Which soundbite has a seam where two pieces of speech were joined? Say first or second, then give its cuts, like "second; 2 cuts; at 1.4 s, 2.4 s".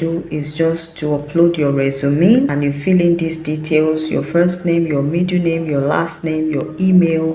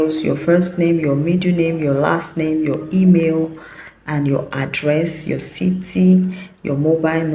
first; 1 cut; at 2.5 s